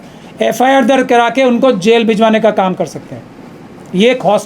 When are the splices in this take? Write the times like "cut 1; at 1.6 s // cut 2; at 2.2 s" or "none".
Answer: none